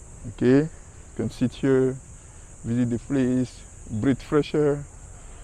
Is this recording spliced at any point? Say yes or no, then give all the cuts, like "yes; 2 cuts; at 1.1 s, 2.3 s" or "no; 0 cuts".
no; 0 cuts